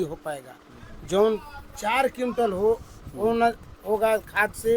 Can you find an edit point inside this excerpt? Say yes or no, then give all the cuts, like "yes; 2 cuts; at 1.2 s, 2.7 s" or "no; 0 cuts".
no; 0 cuts